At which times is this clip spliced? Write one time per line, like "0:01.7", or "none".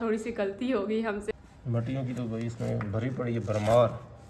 0:01.3